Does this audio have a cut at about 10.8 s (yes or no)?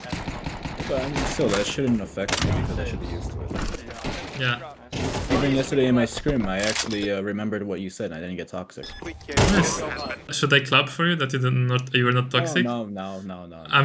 no